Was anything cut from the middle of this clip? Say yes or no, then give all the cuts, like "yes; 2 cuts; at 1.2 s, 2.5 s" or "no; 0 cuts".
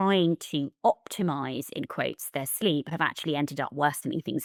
no; 0 cuts